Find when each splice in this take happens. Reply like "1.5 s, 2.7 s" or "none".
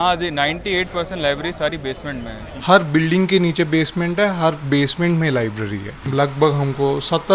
2.5 s, 6.0 s